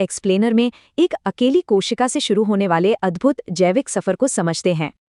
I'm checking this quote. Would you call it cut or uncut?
uncut